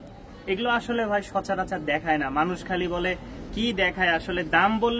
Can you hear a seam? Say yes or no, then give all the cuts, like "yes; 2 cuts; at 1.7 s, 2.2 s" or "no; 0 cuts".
no; 0 cuts